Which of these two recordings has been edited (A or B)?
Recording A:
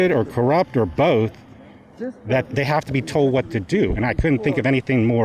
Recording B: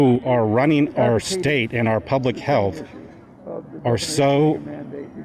A